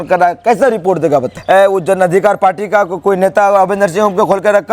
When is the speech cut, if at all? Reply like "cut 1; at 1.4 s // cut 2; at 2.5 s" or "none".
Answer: cut 1; at 1.3 s